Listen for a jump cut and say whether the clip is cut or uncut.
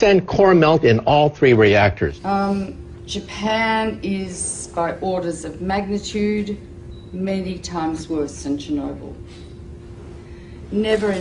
cut